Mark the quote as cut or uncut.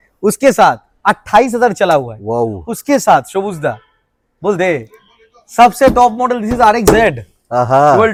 uncut